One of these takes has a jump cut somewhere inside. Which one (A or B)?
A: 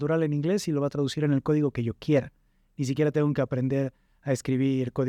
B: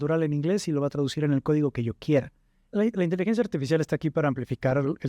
B